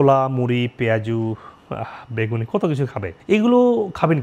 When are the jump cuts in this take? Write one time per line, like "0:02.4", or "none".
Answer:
0:03.1

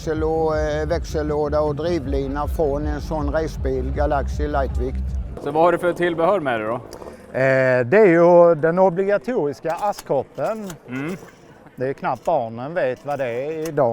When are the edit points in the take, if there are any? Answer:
0:05.2

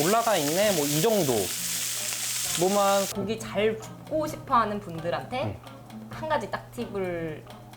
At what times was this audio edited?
0:03.1

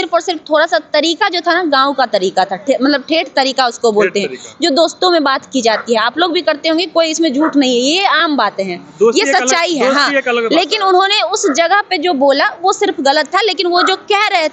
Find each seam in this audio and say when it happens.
none

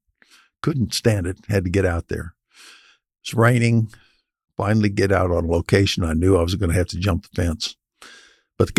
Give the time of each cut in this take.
none

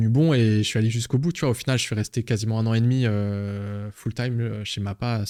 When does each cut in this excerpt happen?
none

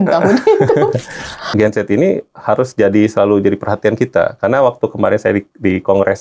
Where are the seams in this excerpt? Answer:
0:01.5

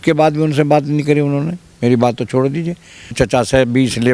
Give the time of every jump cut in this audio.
0:03.1

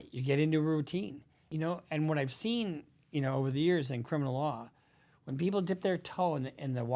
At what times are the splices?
0:01.5

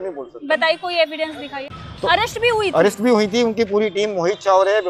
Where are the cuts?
0:01.6

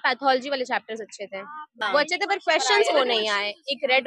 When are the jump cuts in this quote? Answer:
0:01.7

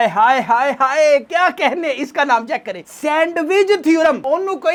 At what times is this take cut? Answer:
none

